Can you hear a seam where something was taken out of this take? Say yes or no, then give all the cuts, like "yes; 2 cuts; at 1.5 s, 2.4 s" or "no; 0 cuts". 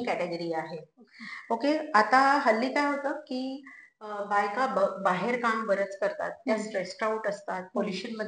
no; 0 cuts